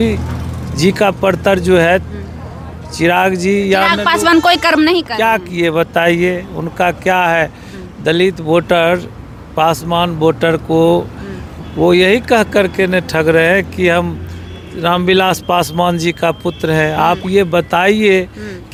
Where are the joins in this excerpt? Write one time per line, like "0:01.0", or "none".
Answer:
none